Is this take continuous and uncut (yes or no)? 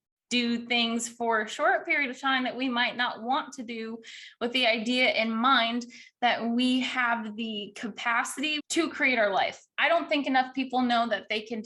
no